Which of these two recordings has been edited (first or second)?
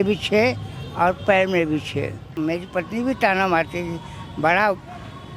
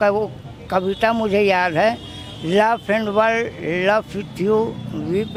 first